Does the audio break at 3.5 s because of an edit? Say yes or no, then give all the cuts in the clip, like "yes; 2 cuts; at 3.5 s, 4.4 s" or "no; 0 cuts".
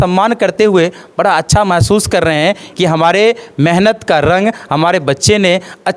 no; 0 cuts